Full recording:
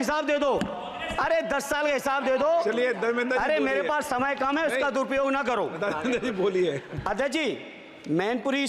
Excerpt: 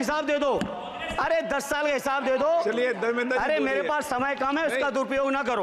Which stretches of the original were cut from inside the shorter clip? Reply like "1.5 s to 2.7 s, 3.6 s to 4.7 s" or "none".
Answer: none